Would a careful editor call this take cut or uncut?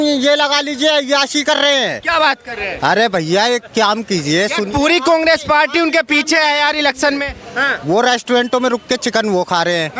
uncut